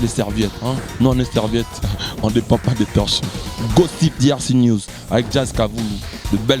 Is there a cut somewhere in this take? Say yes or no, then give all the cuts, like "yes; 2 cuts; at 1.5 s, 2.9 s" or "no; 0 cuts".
no; 0 cuts